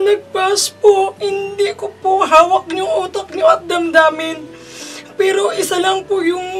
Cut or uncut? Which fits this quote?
cut